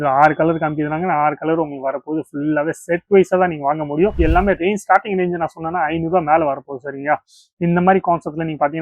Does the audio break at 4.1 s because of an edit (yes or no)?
yes